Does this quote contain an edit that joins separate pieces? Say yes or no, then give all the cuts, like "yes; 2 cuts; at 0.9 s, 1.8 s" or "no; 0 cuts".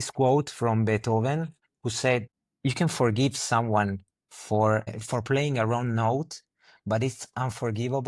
yes; 2 cuts; at 2.4 s, 5.0 s